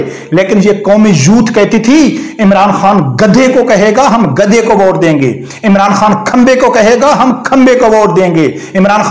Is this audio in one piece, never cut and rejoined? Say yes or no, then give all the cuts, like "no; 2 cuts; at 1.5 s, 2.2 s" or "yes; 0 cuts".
yes; 0 cuts